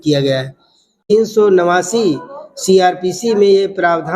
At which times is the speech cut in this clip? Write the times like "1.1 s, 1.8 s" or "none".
1.1 s